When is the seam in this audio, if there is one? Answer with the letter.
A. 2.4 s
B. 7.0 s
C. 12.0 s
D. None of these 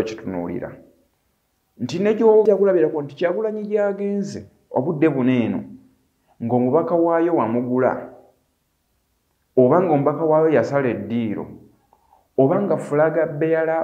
A